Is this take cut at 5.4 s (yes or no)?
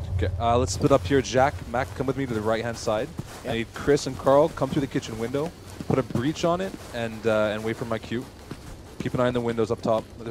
no